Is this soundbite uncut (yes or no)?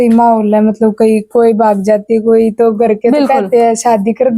no